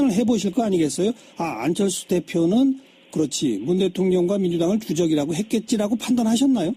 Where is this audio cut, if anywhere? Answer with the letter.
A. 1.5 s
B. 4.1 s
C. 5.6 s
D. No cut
A